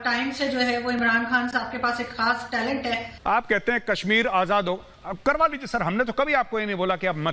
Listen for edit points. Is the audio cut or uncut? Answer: cut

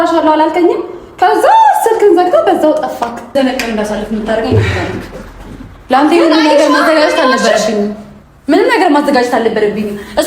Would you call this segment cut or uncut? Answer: cut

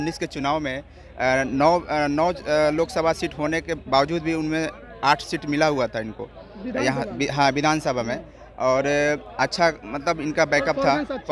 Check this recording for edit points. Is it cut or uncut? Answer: uncut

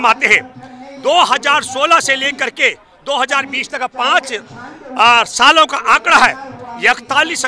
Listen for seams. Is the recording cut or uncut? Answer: uncut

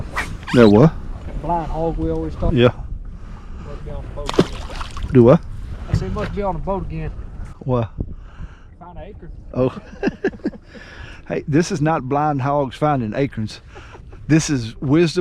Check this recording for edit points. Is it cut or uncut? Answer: cut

